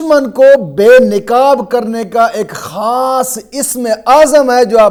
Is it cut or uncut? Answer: uncut